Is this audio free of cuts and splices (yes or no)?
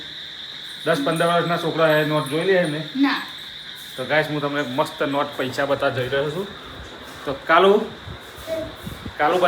yes